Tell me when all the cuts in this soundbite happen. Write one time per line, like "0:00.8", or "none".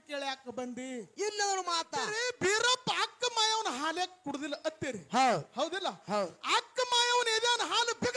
0:02.2